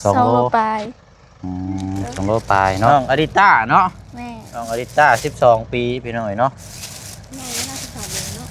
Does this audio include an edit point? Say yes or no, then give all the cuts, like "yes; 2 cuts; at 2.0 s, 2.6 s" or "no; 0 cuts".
yes; 1 cut; at 2.9 s